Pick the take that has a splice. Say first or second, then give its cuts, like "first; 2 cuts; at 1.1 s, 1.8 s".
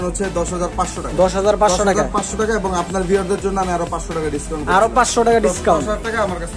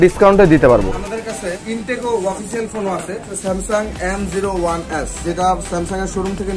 second; 3 cuts; at 0.9 s, 3.3 s, 5.2 s